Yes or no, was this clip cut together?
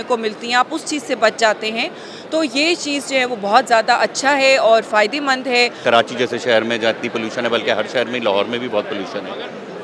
no